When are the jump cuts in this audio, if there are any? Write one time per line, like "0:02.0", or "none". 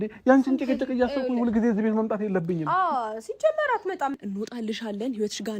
0:04.1